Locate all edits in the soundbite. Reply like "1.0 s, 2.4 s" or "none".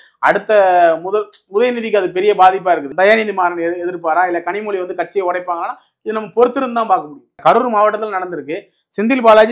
2.9 s, 7.3 s